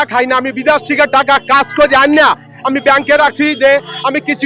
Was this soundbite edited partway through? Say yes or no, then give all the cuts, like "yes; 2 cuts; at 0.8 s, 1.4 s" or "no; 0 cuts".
no; 0 cuts